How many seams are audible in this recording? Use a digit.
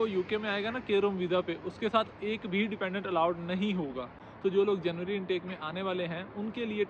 1